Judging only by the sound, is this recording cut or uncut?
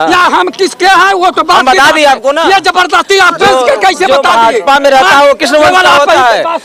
uncut